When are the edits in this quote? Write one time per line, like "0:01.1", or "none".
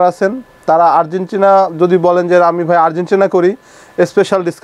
none